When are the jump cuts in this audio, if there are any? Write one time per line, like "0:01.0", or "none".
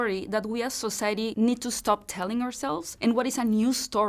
0:01.3